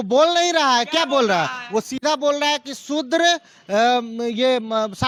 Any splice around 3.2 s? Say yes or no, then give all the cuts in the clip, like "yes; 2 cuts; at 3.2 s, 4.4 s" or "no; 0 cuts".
no; 0 cuts